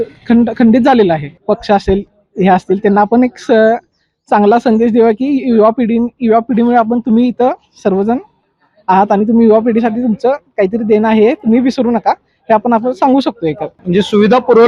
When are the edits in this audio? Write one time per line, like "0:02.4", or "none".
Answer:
0:01.3
0:13.7